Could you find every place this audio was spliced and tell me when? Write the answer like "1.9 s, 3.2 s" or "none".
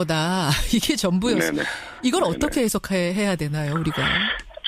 2.4 s

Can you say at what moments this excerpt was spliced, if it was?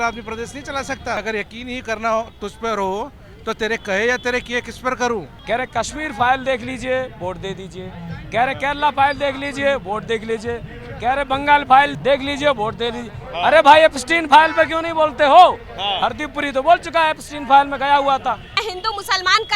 1.2 s, 5.3 s, 11.9 s, 18.7 s

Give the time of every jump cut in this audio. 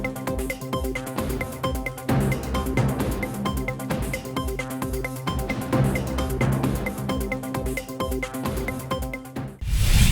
9.1 s

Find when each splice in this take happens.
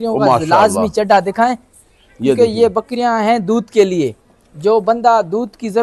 none

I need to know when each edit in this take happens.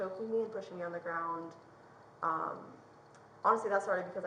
none

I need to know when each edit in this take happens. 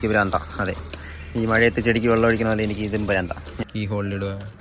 3.5 s

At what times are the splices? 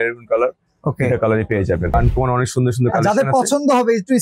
1.9 s

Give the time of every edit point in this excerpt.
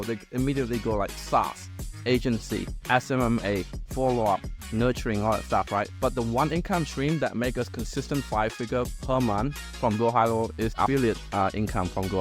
5.9 s, 9.7 s, 10.8 s

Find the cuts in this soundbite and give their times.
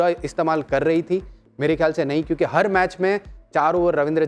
none

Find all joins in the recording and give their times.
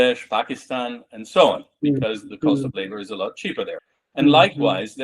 3.9 s

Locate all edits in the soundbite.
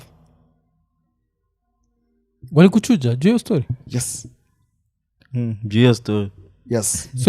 none

